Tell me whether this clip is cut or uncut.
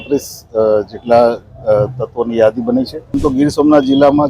cut